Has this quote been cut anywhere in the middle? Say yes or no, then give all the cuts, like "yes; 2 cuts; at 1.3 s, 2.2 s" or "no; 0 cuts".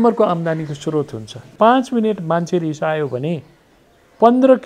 yes; 1 cut; at 1.5 s